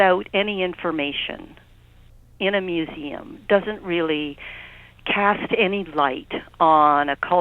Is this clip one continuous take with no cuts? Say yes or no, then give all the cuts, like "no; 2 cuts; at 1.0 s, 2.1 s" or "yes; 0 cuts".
yes; 0 cuts